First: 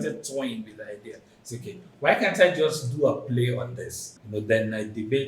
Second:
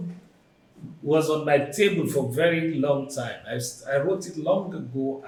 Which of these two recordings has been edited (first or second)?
first